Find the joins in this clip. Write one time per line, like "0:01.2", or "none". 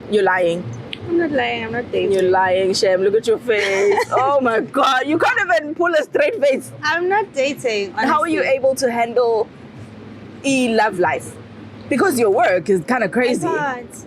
none